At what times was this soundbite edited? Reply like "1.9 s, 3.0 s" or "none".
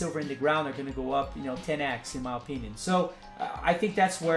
3.2 s